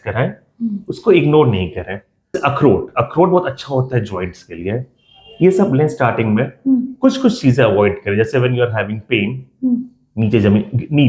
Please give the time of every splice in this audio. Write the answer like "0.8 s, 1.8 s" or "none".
2.4 s